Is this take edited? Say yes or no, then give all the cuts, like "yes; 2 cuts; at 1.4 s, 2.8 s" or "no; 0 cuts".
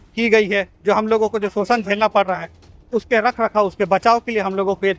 no; 0 cuts